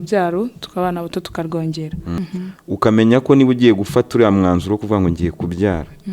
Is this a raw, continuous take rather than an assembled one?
no; 1 cut; at 2.1 s

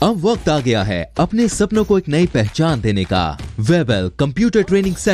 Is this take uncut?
no; 1 cut; at 3.4 s

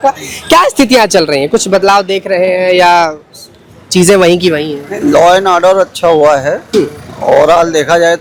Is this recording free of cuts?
yes; 0 cuts

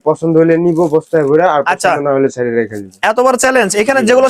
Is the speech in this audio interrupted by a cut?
no; 0 cuts

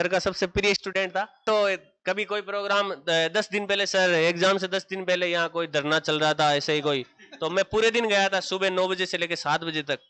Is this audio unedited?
no; 1 cut; at 1.4 s

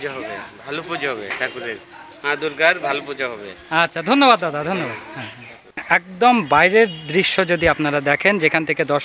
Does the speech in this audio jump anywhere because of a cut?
no; 0 cuts

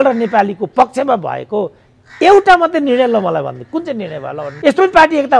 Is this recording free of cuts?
no; 1 cut; at 4.4 s

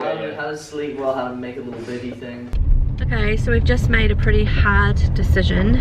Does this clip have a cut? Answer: yes; 1 cut; at 2.6 s

